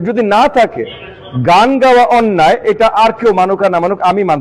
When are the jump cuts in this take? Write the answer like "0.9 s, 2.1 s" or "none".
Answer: 2.3 s